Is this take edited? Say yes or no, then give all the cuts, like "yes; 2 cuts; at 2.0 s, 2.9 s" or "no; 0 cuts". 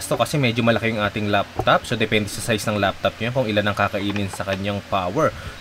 no; 0 cuts